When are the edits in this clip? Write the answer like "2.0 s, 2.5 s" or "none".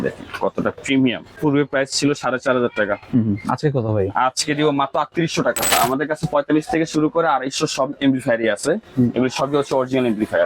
1.3 s, 5.7 s

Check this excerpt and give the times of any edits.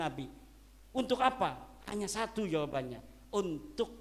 none

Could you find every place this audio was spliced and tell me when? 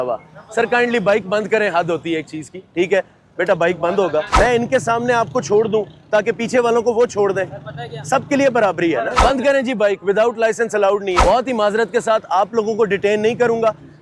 4.3 s, 9.1 s, 11.2 s

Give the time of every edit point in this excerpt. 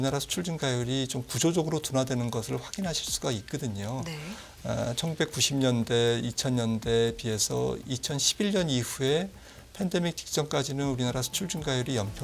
none

